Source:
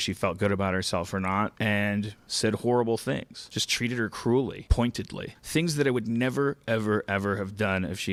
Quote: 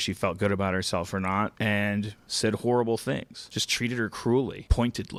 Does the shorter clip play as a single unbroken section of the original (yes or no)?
yes